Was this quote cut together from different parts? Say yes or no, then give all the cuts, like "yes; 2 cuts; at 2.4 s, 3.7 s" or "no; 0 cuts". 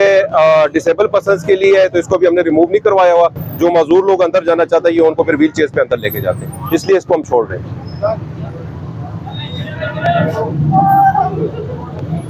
no; 0 cuts